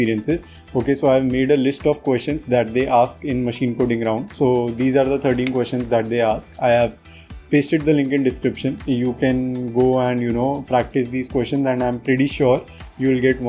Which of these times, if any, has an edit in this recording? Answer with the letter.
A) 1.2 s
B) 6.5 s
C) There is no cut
C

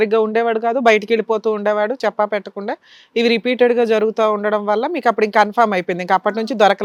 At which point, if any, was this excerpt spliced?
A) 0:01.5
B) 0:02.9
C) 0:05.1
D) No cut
D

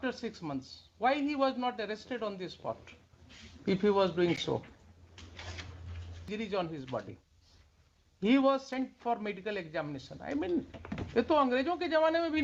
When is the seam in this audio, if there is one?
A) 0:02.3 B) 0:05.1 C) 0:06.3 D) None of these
C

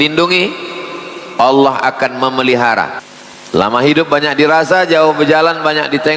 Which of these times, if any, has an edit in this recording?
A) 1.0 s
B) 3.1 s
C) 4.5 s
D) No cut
B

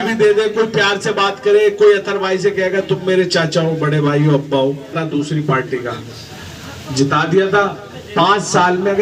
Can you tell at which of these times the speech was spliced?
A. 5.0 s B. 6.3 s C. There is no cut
A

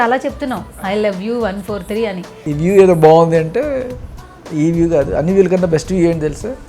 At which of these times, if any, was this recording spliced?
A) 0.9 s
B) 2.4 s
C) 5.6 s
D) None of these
B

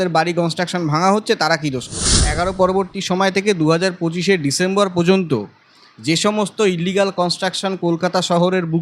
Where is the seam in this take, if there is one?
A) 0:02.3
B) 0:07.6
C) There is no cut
A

